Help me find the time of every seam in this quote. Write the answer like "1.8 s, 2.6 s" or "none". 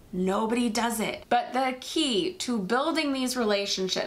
1.2 s